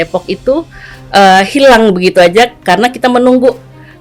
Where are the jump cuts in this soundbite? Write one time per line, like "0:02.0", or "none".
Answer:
none